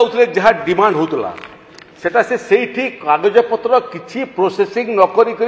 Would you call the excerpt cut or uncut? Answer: uncut